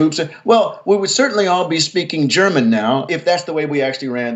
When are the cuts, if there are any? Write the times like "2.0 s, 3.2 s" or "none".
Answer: 3.1 s